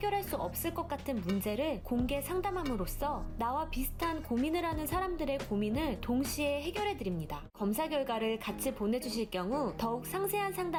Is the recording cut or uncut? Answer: uncut